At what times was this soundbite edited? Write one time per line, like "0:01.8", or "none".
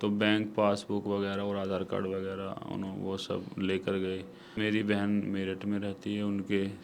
0:04.6